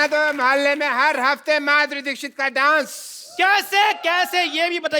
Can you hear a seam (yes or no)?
no